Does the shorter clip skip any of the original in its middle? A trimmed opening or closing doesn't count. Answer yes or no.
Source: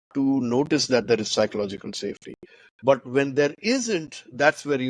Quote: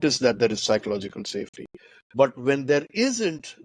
no